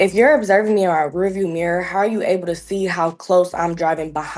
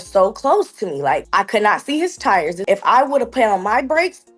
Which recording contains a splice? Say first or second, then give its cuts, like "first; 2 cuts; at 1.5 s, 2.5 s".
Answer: second; 2 cuts; at 1.3 s, 2.6 s